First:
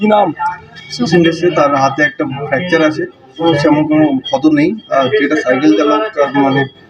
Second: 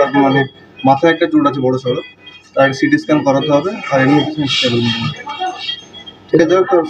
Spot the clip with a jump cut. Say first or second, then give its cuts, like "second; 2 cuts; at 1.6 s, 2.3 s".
first; 2 cuts; at 1.1 s, 3.4 s